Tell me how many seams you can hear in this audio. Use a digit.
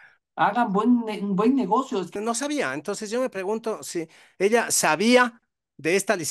1